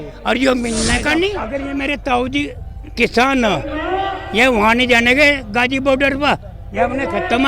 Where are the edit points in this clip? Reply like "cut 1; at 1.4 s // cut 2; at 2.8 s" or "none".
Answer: cut 1; at 1.4 s